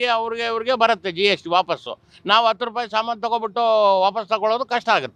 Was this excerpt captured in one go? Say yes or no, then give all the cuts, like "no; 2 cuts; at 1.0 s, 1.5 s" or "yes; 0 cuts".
yes; 0 cuts